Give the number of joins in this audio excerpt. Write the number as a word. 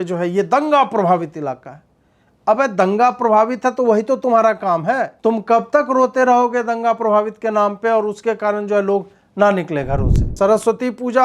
two